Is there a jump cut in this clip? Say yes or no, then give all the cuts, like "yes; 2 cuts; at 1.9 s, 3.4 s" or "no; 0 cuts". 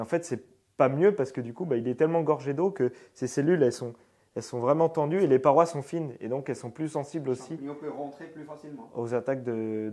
no; 0 cuts